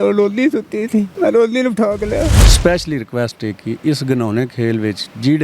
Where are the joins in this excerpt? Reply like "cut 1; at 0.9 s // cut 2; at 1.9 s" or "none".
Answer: cut 1; at 1.1 s // cut 2; at 2.5 s